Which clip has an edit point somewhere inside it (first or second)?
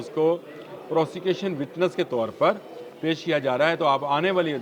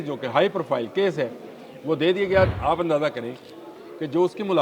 second